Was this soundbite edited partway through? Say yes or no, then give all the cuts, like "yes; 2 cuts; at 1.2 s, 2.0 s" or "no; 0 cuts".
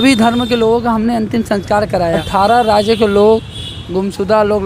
yes; 1 cut; at 2.2 s